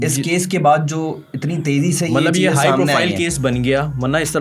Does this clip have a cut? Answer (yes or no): no